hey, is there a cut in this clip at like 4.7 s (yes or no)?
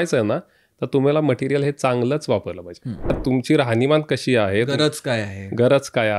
yes